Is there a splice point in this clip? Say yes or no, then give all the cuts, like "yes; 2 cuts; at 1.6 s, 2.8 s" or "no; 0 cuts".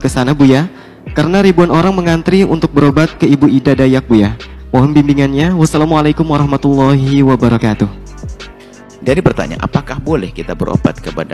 no; 0 cuts